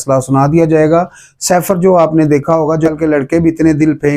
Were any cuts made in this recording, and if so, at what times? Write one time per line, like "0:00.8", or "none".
0:02.9